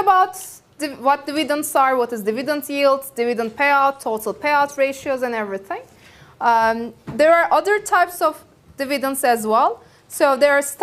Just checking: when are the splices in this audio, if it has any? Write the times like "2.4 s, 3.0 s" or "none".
3.0 s